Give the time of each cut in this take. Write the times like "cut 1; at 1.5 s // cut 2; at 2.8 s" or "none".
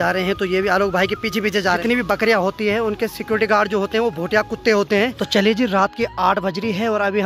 cut 1; at 1.8 s // cut 2; at 5.2 s